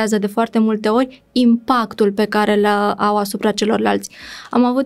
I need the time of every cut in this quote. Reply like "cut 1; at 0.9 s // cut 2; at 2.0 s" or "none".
none